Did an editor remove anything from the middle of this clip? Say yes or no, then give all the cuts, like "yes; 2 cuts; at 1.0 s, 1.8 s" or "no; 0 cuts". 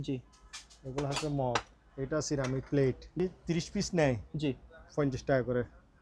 yes; 1 cut; at 3.2 s